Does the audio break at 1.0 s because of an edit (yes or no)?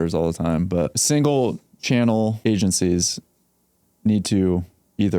yes